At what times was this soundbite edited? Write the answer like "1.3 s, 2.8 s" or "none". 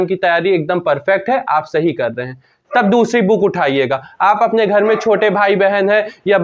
none